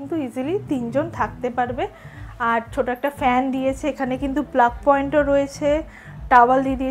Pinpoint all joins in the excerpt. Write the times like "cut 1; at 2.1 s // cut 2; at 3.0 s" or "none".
none